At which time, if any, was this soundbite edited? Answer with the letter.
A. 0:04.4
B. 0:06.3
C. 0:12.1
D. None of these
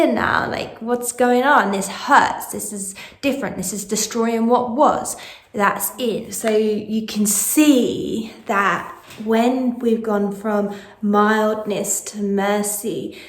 B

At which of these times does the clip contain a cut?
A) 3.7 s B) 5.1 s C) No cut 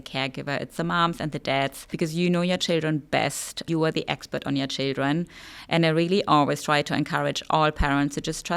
A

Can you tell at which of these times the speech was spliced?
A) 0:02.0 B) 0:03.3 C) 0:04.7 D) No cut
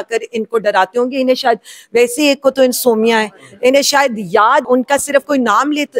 C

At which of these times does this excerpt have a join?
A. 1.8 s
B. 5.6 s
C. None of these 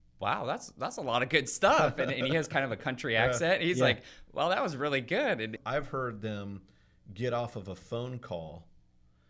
B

